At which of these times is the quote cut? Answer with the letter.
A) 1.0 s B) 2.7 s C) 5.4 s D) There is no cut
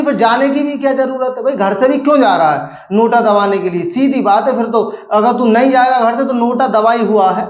D